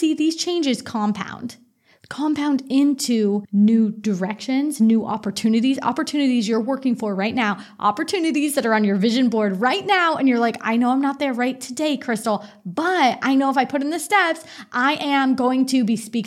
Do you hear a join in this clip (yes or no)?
yes